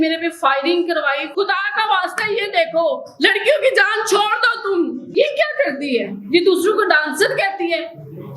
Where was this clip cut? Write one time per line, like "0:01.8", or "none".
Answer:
0:01.3
0:05.1